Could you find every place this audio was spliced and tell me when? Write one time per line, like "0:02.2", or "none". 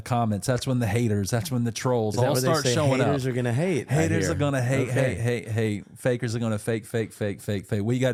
none